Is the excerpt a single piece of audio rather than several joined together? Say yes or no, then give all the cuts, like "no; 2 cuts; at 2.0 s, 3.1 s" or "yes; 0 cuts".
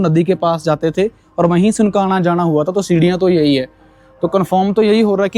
yes; 0 cuts